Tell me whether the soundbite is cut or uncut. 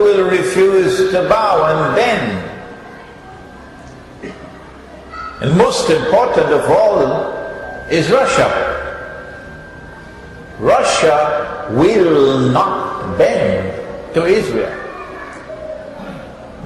cut